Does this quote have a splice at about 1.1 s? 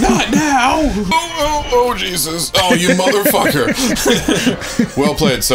yes; 1 cut; at 1.1 s

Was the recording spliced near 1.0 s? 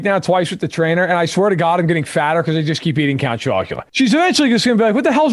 no; 1 cut; at 3.8 s

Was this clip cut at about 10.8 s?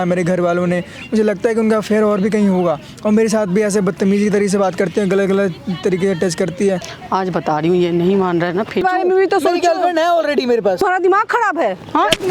yes; 3 cuts; at 7.0 s, 8.8 s, 10.8 s

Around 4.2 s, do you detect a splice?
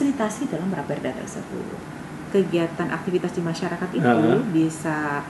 no; 1 cut; at 1.8 s

